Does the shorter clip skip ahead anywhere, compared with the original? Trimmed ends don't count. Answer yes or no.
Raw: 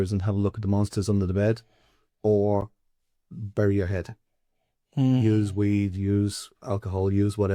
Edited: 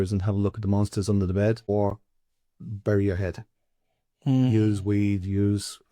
yes